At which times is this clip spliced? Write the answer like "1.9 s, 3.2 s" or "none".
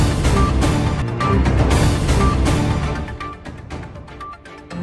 0.9 s